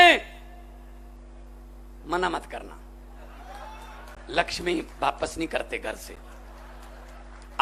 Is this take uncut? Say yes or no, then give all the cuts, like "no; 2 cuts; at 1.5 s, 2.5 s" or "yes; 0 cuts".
yes; 0 cuts